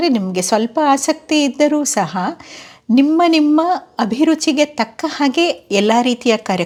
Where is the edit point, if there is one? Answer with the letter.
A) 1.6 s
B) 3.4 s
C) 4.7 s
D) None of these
D